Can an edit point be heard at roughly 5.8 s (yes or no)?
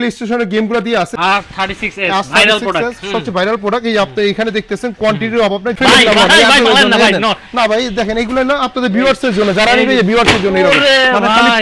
yes